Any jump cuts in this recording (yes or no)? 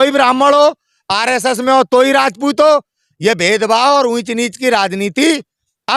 no